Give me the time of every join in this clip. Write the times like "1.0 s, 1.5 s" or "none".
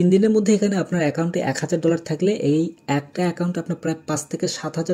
none